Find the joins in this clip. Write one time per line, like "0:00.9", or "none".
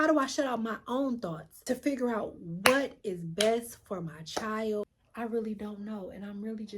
0:01.5
0:05.0